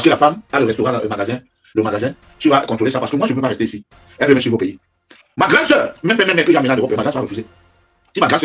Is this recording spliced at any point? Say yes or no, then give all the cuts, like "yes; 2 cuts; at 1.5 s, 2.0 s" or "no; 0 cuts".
no; 0 cuts